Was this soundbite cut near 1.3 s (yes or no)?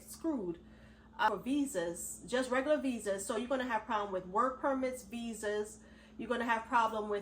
yes